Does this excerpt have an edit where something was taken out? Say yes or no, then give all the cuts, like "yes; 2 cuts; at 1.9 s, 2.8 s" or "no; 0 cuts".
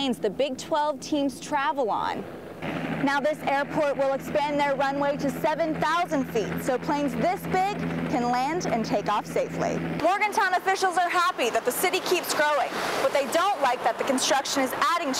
yes; 1 cut; at 9.9 s